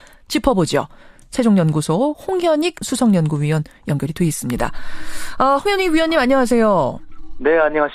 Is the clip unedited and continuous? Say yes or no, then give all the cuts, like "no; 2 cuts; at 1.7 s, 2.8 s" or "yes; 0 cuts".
no; 1 cut; at 6.8 s